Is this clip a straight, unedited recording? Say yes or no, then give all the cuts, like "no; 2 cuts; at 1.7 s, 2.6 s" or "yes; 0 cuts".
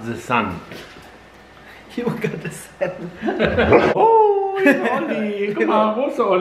no; 1 cut; at 3.9 s